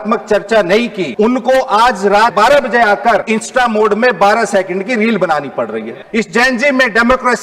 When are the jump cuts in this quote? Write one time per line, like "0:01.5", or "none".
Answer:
0:01.0
0:02.3
0:03.3
0:05.9

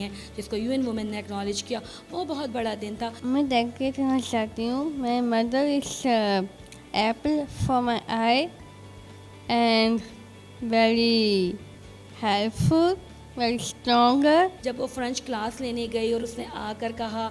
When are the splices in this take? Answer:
0:03.2
0:14.6

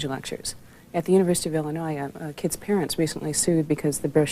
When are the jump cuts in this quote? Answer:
0:02.9

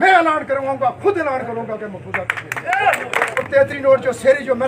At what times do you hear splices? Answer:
0:03.4

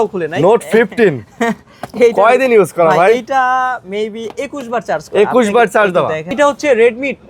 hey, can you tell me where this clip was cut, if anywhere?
0:06.3

